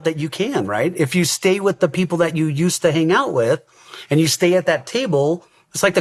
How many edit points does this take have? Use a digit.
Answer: 0